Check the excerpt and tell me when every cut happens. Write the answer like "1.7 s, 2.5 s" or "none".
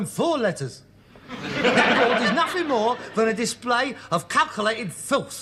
1.8 s